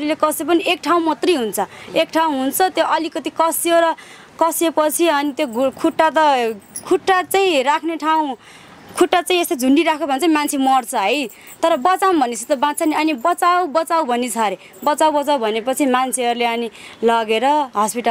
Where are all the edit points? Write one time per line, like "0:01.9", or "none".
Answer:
none